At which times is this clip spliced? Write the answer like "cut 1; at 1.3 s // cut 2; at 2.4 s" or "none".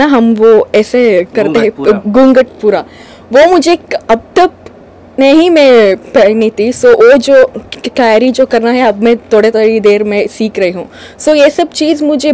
none